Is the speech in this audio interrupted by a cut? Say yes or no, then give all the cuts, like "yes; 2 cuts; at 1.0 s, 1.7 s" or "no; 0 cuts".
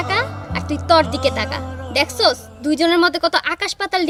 no; 0 cuts